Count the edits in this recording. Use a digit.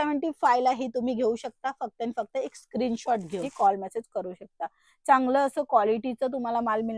1